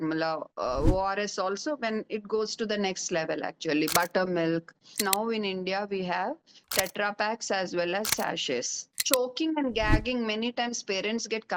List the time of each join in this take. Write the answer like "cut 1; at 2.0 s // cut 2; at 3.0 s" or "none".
cut 1; at 4.9 s // cut 2; at 9.0 s